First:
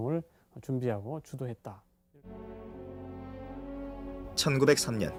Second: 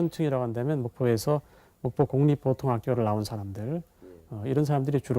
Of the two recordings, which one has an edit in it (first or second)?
second